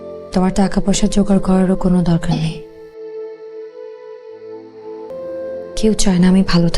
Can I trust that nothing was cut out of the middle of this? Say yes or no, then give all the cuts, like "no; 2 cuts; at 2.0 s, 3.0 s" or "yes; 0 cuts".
no; 1 cut; at 5.1 s